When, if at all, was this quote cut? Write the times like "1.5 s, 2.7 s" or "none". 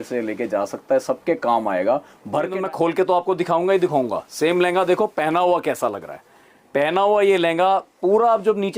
2.6 s